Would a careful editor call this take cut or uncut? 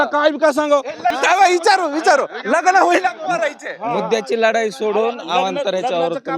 cut